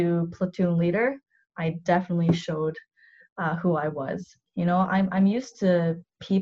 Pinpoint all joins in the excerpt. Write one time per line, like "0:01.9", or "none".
0:04.4